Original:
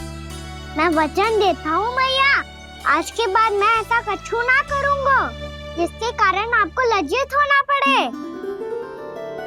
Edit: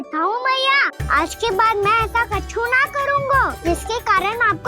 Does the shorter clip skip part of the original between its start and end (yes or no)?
yes